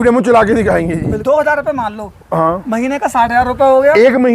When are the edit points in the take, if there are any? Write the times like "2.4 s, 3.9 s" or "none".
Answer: 0.9 s